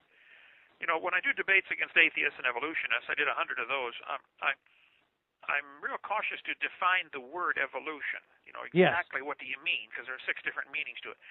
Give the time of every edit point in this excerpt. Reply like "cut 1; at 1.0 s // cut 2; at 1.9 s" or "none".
cut 1; at 1.1 s

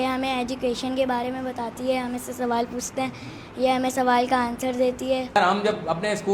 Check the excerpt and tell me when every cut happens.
none

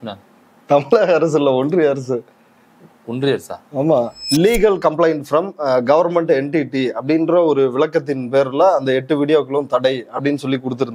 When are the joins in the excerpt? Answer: cut 1; at 4.2 s

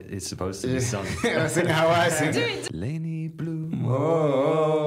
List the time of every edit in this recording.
cut 1; at 2.6 s

